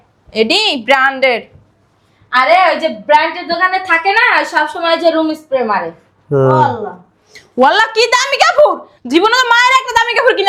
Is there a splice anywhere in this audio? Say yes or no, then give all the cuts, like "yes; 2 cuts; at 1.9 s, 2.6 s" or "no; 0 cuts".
no; 0 cuts